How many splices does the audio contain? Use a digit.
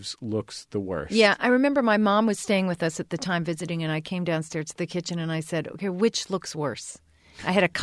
0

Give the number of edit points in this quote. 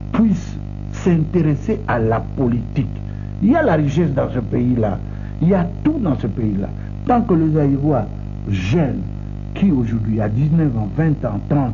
0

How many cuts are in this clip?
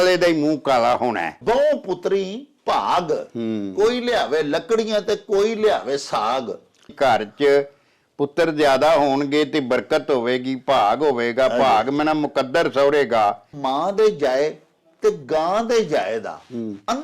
3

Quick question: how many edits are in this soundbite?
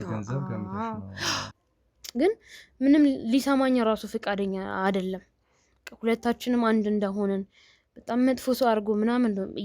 1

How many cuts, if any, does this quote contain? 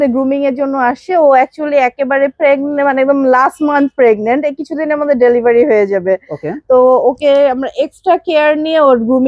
0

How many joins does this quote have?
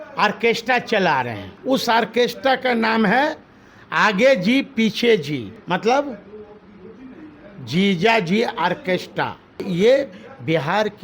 3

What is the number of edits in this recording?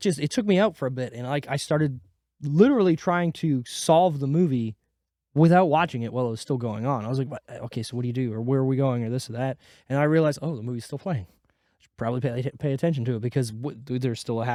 0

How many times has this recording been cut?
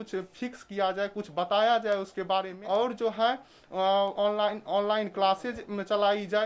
0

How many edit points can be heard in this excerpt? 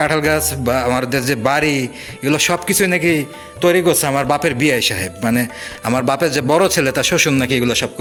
0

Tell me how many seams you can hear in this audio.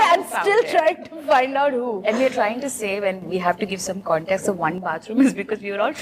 0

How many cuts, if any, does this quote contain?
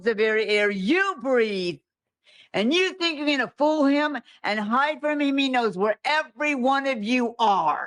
0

